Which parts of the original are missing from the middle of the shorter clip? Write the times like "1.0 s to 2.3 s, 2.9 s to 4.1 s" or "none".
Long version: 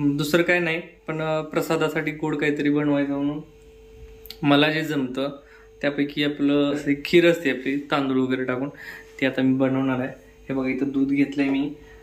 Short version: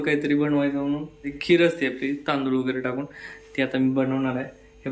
3.6 s to 6.9 s